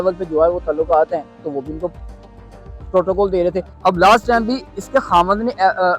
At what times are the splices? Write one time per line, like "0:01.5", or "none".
0:03.7